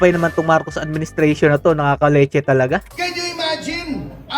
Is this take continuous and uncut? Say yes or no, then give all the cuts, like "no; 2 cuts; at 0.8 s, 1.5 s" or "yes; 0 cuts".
yes; 0 cuts